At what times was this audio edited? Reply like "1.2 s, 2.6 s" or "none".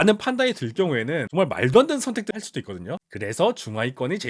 2.3 s